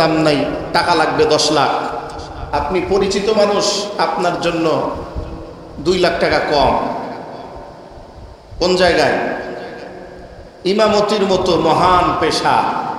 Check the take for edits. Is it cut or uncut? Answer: uncut